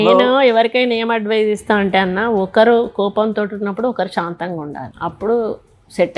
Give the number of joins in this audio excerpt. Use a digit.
1